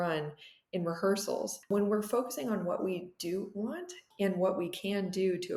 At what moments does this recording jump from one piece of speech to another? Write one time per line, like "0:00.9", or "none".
none